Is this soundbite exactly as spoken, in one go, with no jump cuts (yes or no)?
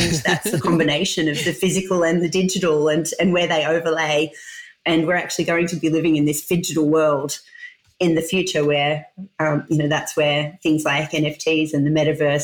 yes